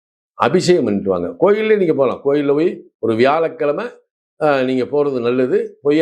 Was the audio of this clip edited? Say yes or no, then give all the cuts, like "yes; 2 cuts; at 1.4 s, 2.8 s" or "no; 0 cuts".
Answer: no; 0 cuts